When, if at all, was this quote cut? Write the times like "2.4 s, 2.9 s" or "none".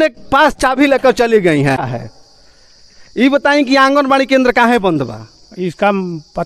1.9 s